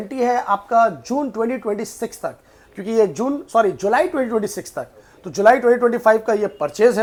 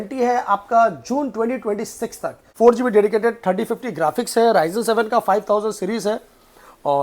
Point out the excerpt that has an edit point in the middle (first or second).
second